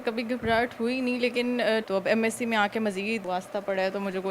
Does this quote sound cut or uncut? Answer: cut